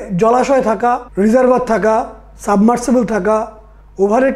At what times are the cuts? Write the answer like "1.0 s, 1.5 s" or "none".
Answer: 1.1 s